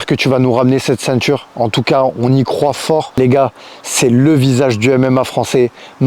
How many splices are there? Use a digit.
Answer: 1